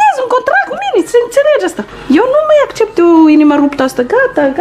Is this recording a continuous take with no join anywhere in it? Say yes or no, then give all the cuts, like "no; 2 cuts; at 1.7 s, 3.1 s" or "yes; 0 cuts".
no; 2 cuts; at 1.0 s, 1.9 s